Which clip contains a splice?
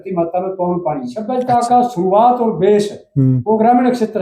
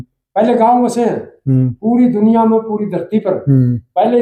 first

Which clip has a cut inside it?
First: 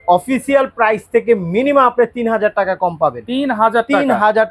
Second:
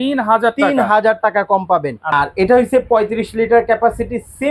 second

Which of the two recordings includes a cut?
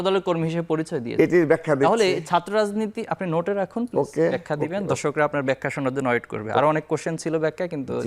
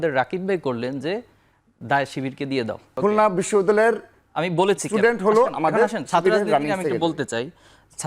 second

